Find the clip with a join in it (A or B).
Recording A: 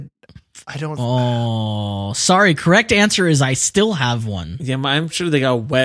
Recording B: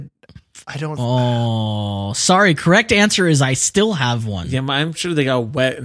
B